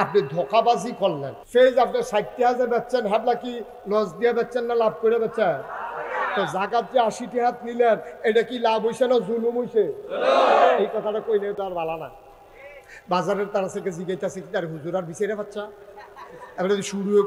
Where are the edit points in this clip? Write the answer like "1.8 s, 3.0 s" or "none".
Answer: 1.3 s

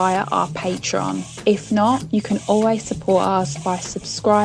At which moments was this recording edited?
none

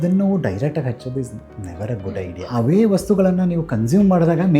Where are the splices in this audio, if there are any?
2.0 s

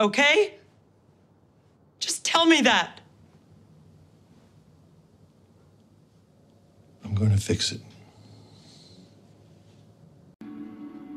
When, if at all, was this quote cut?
10.0 s

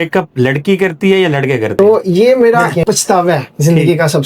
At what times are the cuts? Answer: 1.8 s

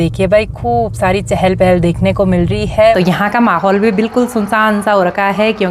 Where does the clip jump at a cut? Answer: 3.0 s

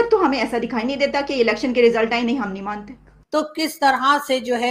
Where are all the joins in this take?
3.1 s

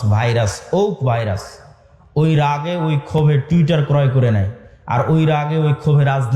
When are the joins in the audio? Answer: none

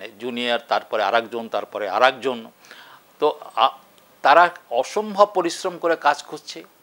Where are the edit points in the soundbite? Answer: none

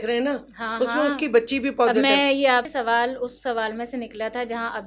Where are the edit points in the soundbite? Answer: 2.7 s

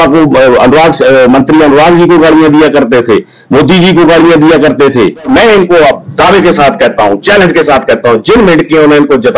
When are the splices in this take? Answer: 5.3 s

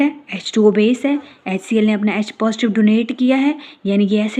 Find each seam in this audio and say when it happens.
none

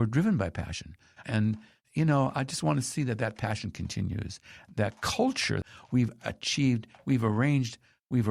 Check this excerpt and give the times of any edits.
5.7 s

